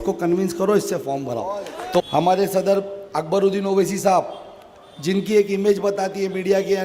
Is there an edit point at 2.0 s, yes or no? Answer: yes